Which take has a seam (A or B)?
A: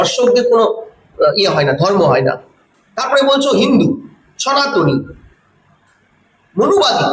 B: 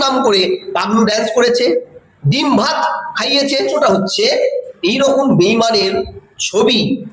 B